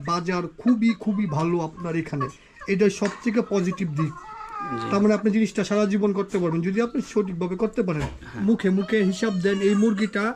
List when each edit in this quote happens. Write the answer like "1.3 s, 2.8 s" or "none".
8.4 s